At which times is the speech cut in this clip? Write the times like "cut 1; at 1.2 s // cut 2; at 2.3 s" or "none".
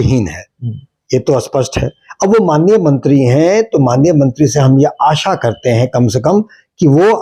none